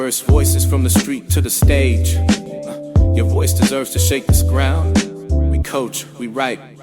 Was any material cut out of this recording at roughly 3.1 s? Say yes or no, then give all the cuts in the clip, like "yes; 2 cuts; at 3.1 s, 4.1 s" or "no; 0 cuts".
no; 0 cuts